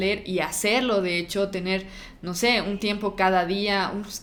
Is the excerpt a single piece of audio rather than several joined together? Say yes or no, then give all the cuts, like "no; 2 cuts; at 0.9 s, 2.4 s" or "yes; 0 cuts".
yes; 0 cuts